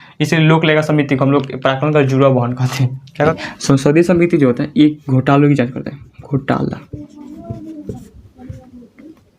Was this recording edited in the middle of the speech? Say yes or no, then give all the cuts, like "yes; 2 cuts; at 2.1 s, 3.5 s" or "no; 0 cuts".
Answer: yes; 1 cut; at 3.3 s